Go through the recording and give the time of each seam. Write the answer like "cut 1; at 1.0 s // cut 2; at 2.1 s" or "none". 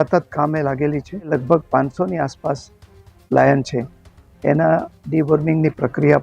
cut 1; at 1.3 s